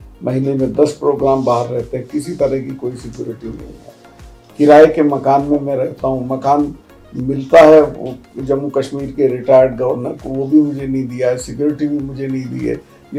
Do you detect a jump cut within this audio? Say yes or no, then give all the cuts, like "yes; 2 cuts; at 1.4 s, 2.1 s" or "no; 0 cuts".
no; 0 cuts